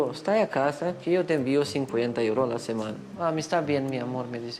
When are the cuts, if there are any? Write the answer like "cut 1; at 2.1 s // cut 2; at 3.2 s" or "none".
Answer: cut 1; at 3.0 s